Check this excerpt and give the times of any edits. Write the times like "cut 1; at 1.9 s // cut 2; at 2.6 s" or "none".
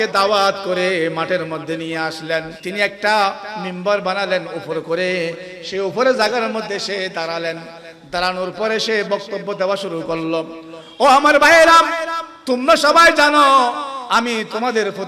cut 1; at 2.6 s